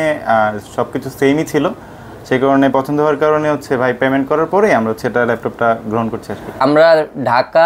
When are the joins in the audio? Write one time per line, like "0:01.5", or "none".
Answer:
0:06.6